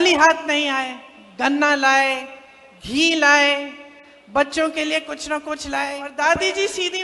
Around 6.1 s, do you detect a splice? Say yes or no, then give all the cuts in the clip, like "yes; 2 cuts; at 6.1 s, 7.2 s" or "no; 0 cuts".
yes; 1 cut; at 6.1 s